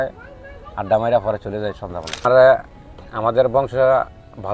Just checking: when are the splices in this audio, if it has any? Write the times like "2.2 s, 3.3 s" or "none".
2.2 s